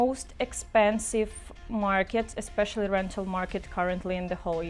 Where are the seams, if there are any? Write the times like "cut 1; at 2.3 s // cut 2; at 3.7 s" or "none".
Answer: none